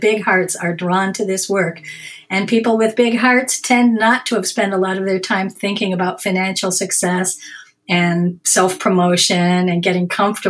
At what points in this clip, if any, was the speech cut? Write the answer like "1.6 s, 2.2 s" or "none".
none